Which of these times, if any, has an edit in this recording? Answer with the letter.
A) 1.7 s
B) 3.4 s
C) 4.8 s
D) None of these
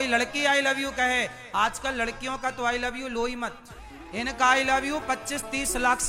D